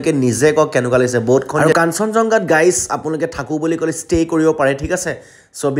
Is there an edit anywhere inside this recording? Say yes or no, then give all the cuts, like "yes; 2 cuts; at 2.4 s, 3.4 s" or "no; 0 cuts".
yes; 1 cut; at 1.6 s